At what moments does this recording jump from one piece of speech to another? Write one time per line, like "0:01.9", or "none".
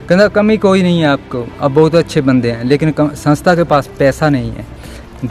none